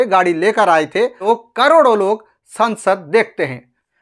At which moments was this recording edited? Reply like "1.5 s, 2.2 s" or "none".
1.2 s